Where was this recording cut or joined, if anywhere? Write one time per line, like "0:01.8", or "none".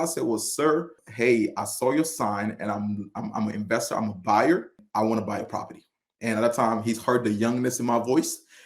0:01.0
0:04.8